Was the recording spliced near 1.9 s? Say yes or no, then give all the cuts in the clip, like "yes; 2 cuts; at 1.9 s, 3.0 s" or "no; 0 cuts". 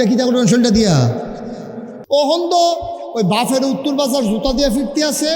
yes; 1 cut; at 1.9 s